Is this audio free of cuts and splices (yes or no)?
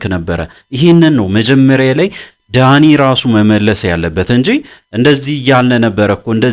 yes